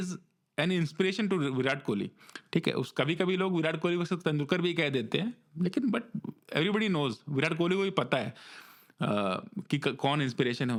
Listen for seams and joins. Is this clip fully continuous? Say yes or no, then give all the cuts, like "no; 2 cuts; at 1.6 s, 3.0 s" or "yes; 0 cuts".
yes; 0 cuts